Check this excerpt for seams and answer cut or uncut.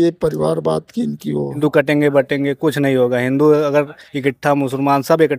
cut